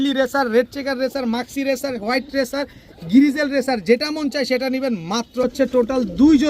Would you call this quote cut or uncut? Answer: cut